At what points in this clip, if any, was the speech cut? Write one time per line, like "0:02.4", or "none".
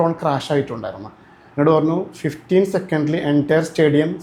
none